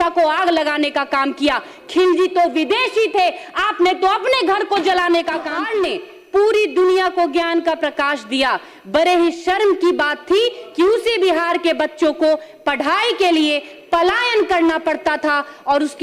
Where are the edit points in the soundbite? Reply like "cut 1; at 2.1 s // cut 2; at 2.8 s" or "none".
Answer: cut 1; at 5.6 s